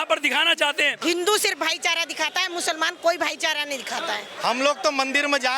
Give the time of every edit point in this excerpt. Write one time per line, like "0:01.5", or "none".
0:01.0
0:04.3